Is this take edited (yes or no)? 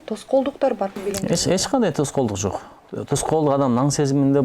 yes